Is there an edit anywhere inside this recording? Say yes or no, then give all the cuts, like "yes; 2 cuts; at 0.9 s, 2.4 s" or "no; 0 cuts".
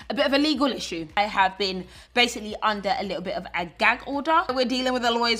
yes; 2 cuts; at 1.2 s, 4.5 s